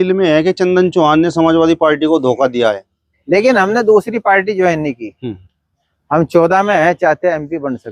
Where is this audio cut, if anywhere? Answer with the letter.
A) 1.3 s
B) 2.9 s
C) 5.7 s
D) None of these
B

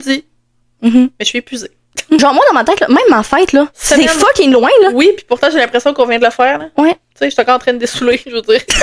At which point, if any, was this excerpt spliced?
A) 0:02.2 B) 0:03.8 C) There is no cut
A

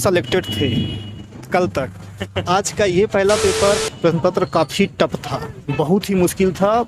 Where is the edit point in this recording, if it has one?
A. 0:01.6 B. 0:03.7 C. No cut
B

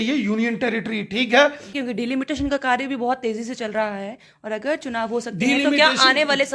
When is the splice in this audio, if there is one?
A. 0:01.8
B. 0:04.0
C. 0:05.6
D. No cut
A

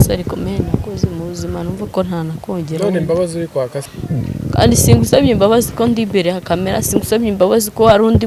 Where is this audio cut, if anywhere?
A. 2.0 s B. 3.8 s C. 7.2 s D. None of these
B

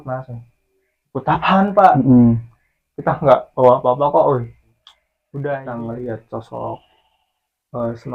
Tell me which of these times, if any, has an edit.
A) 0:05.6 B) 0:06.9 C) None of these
A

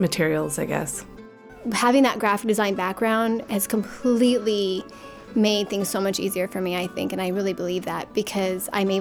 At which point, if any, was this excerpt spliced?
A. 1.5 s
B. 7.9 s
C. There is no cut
A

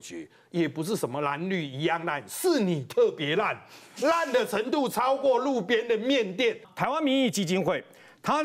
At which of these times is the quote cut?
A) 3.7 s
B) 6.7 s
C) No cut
B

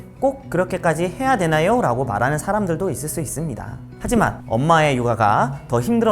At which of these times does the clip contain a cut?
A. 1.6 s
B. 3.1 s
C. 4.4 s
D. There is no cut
C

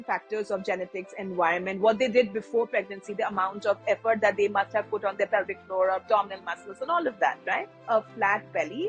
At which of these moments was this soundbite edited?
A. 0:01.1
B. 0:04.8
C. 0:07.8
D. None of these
C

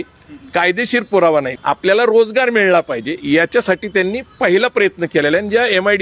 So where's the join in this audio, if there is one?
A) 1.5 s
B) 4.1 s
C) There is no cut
A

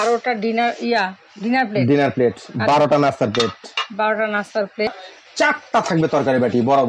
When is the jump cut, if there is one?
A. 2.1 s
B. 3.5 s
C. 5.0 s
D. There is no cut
C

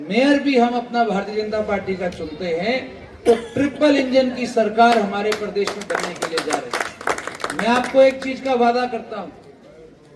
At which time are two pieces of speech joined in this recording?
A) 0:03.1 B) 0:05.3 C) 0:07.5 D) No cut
D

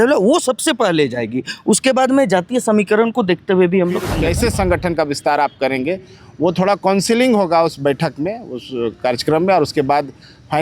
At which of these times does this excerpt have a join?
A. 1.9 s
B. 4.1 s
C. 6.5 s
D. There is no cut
B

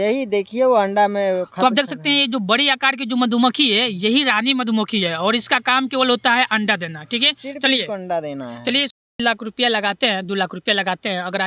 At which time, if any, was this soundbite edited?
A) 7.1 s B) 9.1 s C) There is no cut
B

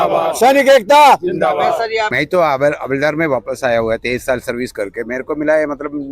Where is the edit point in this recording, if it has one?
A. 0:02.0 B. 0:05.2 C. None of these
A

